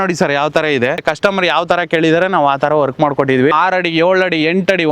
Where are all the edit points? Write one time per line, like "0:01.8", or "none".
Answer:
0:01.0
0:03.5

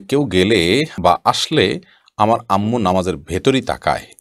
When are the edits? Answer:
none

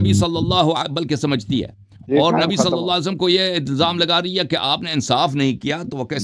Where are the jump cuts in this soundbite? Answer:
none

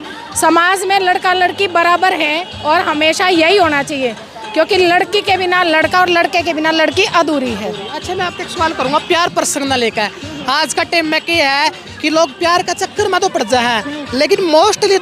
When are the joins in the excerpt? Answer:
none

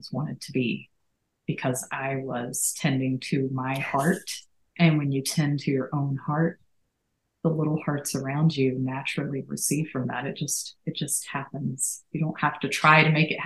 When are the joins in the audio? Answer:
none

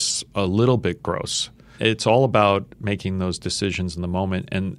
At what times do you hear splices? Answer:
0:01.8

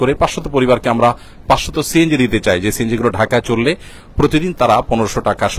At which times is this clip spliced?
none

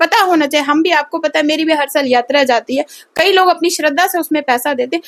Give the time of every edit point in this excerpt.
none

